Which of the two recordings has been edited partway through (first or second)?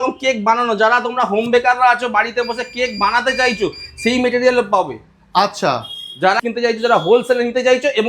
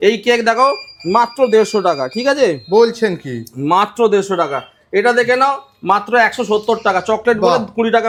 first